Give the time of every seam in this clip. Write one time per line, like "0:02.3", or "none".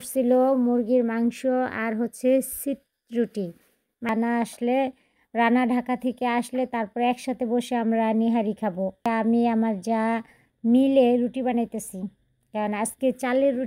0:04.1
0:09.1